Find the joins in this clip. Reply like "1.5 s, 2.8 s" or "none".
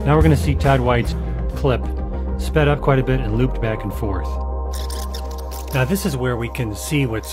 1.2 s